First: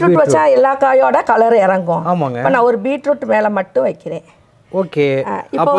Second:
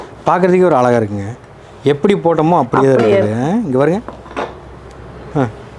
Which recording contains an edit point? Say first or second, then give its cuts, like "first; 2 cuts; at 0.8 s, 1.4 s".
second; 1 cut; at 4.0 s